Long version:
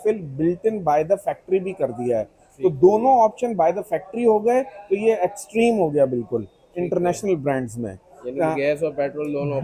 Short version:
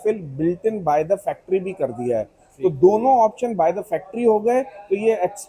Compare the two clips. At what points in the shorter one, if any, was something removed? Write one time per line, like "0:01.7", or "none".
none